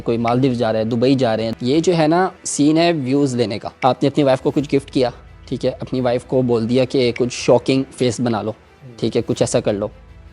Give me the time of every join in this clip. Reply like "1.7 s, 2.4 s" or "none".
1.5 s, 2.4 s, 3.6 s